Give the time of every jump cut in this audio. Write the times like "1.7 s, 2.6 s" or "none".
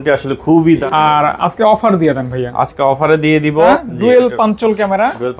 0.8 s, 3.8 s